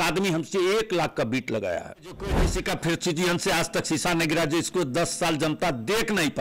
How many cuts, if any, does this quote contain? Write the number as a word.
one